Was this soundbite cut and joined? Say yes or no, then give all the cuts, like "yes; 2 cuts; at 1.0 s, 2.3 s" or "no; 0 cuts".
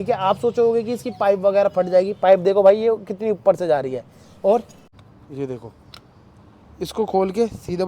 yes; 1 cut; at 4.8 s